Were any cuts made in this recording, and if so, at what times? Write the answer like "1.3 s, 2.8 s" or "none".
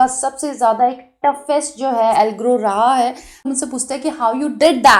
3.5 s